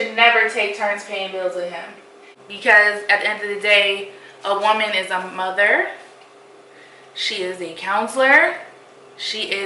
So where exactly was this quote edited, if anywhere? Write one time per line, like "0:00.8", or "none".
0:01.8